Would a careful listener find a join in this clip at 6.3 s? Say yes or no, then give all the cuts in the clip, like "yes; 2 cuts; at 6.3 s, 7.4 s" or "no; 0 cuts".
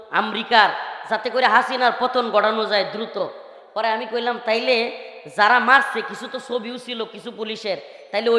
no; 0 cuts